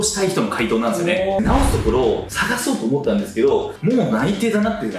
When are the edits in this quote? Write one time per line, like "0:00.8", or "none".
0:01.4

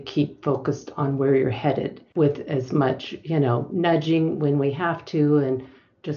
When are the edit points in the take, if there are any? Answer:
0:02.0

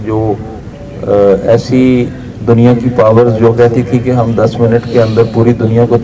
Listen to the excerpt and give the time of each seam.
none

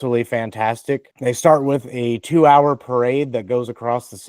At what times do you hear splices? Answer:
0:01.1

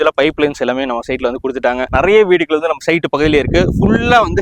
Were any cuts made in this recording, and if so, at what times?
0:01.9

